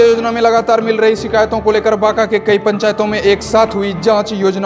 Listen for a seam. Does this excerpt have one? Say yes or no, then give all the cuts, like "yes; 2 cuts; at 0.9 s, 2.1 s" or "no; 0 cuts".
no; 0 cuts